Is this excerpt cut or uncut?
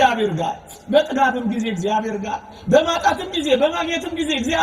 uncut